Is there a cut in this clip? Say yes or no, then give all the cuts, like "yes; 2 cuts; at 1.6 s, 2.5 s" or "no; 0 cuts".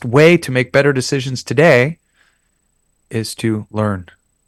no; 0 cuts